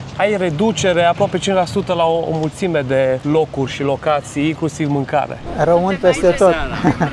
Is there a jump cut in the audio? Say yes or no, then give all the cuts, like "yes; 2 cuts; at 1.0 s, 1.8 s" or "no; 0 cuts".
yes; 2 cuts; at 3.2 s, 5.5 s